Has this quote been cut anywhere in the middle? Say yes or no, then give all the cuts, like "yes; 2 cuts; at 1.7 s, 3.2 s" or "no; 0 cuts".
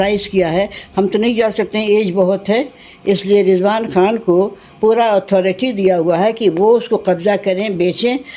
no; 0 cuts